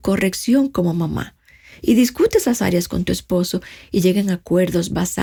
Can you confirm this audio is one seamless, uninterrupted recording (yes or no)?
yes